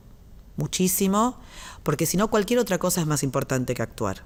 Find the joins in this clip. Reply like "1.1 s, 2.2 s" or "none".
none